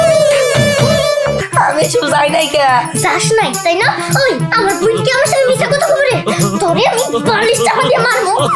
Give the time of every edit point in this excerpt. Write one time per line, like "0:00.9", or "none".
0:01.4